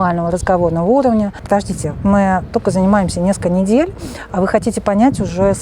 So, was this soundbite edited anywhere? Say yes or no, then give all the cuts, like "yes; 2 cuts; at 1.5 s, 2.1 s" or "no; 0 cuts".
yes; 1 cut; at 1.4 s